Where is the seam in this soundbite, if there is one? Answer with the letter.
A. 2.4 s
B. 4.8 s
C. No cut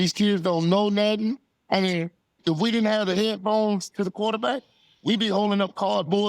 A